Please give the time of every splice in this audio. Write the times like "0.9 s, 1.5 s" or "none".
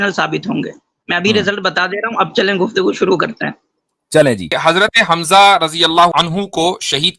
4.5 s, 6.1 s